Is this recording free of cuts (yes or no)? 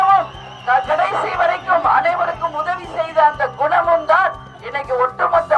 yes